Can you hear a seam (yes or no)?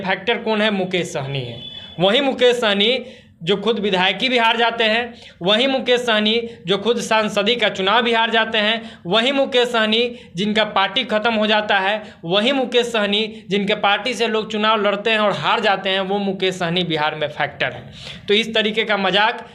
no